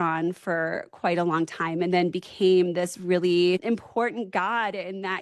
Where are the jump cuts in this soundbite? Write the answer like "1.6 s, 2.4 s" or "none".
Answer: 3.6 s